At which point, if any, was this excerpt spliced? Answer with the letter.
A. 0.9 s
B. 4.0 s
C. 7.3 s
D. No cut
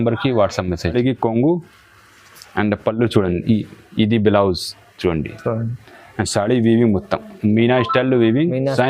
A